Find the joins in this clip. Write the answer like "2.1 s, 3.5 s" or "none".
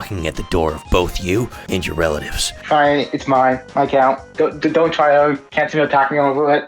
2.5 s, 4.3 s